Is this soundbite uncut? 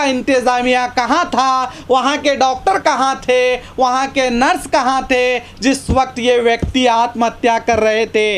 yes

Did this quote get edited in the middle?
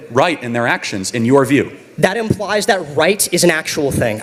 no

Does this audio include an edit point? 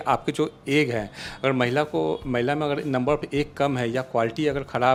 no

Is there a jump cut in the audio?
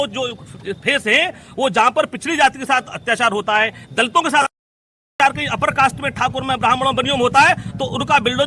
yes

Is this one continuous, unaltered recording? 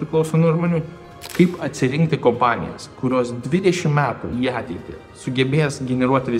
no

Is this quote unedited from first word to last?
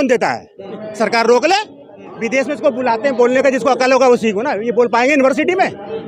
no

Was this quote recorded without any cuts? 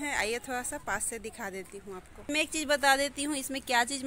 no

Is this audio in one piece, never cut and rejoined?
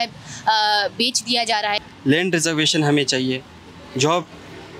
no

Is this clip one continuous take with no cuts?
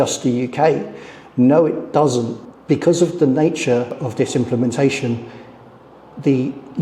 no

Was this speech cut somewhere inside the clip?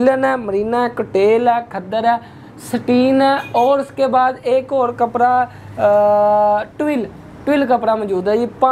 no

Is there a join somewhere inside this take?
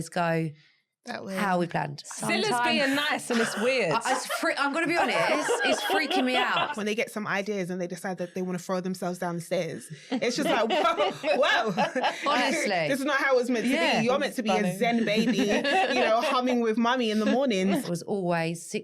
yes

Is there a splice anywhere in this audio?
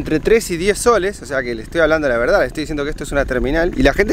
no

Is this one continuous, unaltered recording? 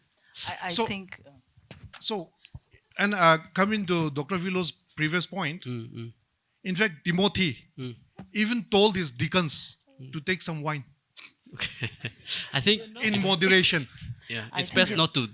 yes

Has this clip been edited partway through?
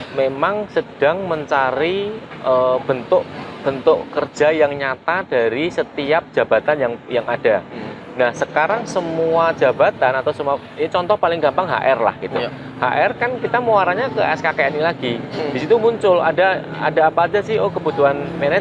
no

